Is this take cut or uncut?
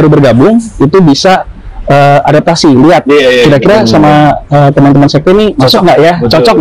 uncut